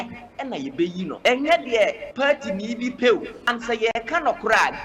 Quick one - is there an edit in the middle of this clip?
yes; 3 cuts; at 1.2 s, 2.0 s, 3.4 s

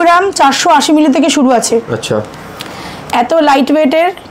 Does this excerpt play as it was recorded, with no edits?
yes; 0 cuts

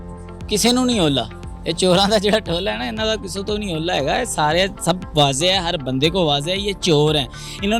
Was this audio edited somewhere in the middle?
no; 0 cuts

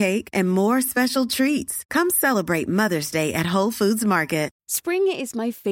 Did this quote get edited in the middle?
yes; 1 cut; at 4.6 s

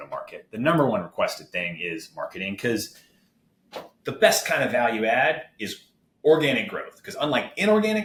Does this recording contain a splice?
no; 0 cuts

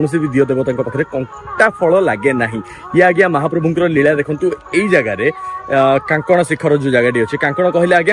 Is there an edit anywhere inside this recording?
no; 0 cuts

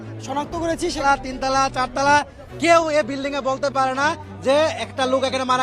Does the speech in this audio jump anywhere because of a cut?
yes; 1 cut; at 1.0 s

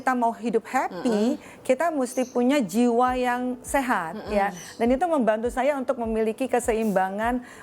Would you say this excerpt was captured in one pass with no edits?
yes; 0 cuts

